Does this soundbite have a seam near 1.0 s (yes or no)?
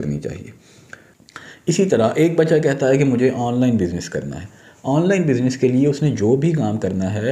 yes